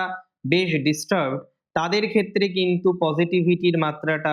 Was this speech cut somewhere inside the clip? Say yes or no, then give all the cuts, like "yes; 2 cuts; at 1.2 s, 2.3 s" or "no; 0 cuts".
no; 0 cuts